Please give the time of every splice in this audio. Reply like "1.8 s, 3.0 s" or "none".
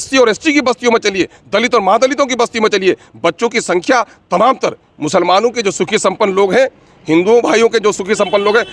none